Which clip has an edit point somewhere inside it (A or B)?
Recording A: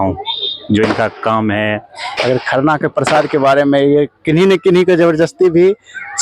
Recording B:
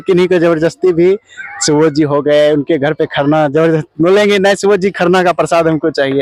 A